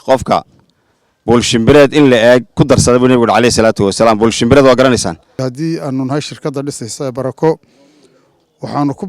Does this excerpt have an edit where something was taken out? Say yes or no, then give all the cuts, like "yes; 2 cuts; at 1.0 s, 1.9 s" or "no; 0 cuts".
yes; 1 cut; at 5.2 s